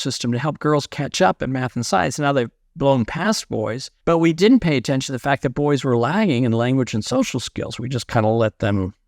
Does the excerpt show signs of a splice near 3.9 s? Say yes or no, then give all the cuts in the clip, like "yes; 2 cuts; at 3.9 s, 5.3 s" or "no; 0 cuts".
yes; 1 cut; at 3.9 s